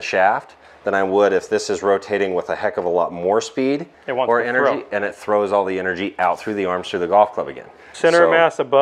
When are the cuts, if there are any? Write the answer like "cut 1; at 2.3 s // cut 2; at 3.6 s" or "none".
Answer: cut 1; at 7.9 s